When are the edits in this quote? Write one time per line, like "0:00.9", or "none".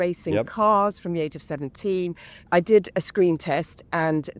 0:02.5